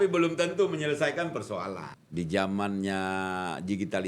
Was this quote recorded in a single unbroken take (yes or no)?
no